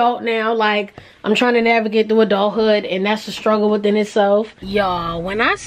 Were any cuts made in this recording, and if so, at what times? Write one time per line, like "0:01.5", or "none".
0:04.7